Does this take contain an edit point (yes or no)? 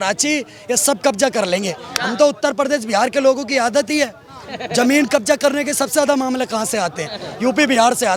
no